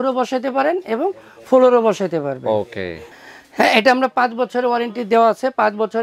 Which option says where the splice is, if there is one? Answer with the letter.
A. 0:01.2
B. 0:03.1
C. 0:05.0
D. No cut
B